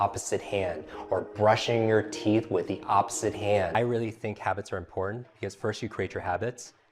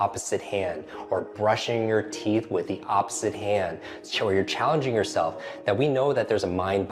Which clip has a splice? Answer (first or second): first